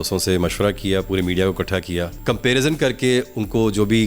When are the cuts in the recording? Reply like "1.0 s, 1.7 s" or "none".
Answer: 2.2 s